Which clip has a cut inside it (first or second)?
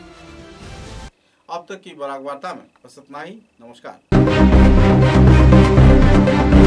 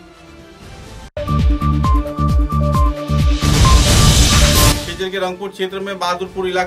second